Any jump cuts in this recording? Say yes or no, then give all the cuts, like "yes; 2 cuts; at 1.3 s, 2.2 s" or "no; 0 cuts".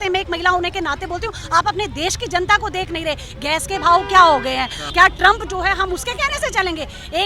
yes; 1 cut; at 4.8 s